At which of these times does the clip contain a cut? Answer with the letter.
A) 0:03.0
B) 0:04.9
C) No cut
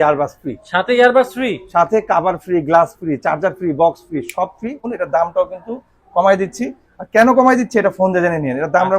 B